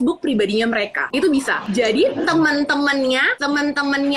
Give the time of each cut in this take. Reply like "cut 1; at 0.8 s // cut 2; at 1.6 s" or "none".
cut 1; at 1.0 s // cut 2; at 1.6 s // cut 3; at 3.3 s